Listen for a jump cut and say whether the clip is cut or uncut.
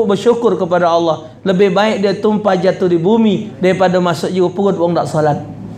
uncut